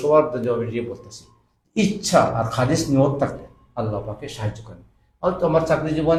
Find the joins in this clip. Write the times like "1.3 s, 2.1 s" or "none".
none